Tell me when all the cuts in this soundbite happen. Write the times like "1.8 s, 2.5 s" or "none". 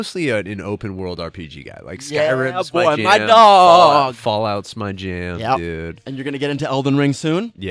none